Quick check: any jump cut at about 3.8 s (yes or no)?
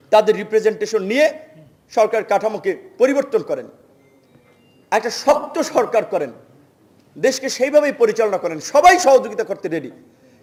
no